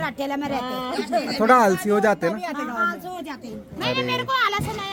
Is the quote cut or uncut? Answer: uncut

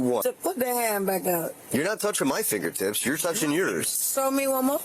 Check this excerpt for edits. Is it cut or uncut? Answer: cut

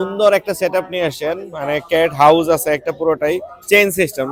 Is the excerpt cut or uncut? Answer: uncut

